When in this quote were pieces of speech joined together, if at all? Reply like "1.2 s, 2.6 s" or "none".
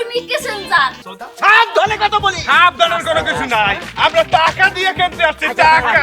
1.1 s